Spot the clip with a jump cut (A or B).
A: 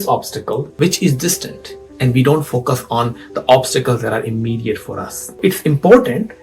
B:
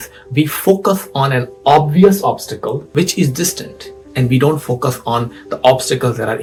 A